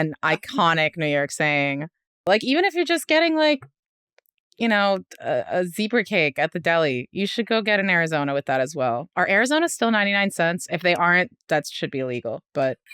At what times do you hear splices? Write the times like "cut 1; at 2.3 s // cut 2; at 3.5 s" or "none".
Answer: cut 1; at 2.3 s